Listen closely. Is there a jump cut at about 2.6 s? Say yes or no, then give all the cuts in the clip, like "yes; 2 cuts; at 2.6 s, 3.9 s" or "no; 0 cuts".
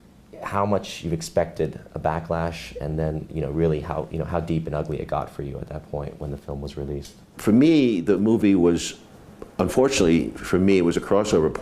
yes; 1 cut; at 2.6 s